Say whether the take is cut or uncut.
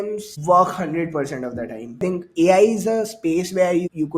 cut